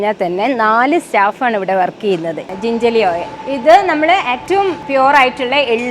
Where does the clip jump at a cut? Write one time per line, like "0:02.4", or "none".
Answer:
0:02.5
0:03.3
0:04.6